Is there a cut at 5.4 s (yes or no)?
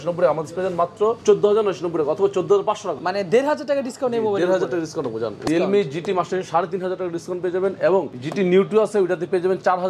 yes